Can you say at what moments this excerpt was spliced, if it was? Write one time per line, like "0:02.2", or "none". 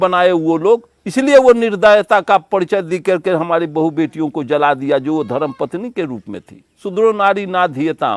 0:06.8